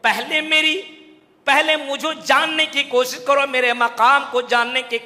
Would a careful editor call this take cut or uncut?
uncut